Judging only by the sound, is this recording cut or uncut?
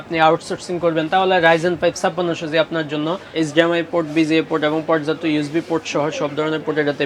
cut